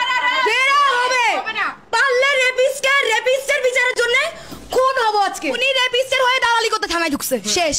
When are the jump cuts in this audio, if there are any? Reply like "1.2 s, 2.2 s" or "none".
5.6 s

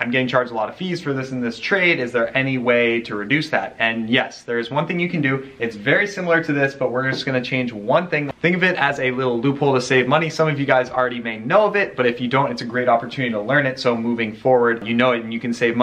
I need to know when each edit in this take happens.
14.8 s

